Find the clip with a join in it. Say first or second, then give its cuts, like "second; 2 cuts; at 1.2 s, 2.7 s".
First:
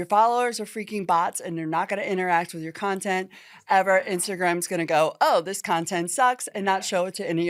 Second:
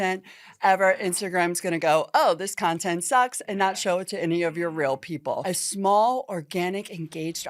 second; 1 cut; at 5.4 s